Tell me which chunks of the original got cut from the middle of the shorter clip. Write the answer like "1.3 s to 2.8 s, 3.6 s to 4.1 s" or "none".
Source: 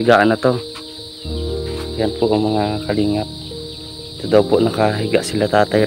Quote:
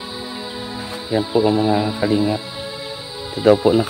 none

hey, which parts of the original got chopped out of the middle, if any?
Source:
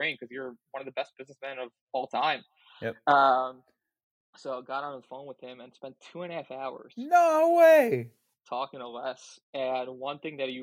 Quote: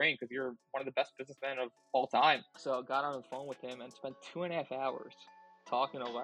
2.5 s to 4.3 s, 7.0 s to 8.0 s

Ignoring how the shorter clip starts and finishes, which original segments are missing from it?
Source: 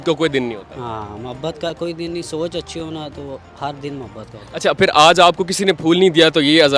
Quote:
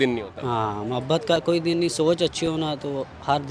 none

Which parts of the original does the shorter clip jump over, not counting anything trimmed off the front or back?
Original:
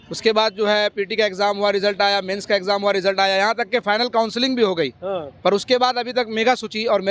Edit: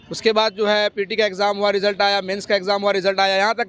none

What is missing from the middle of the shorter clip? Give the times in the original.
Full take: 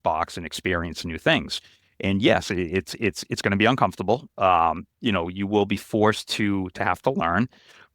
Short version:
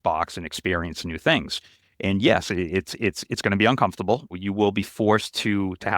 4.3 s to 5.3 s

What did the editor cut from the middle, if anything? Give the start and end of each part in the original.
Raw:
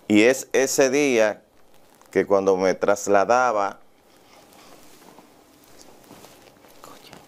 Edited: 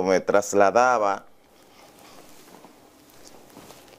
none

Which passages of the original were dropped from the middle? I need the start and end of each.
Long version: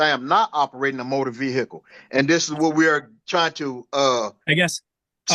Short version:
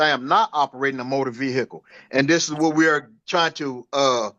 none

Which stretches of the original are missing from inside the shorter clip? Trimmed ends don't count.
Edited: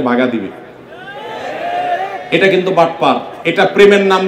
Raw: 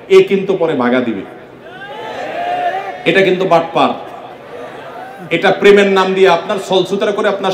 4.0 s to 5.2 s

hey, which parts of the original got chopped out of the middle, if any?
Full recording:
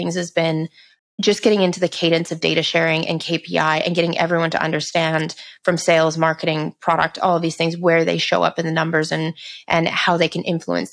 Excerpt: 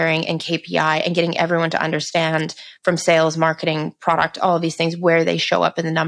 none

